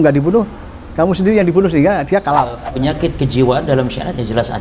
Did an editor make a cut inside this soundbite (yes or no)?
yes